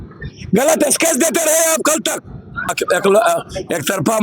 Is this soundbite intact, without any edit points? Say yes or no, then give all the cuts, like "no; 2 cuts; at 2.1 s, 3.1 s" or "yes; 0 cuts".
no; 1 cut; at 2.7 s